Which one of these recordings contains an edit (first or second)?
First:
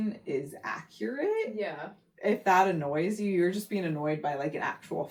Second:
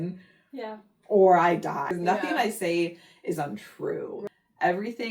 second